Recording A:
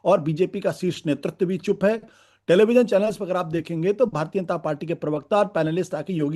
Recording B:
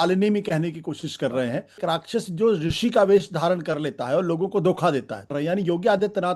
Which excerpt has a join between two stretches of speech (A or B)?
B